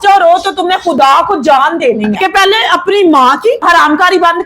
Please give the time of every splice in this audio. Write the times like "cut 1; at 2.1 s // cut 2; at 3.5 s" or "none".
cut 1; at 2.2 s